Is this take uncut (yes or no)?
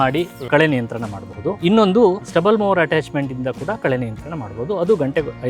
no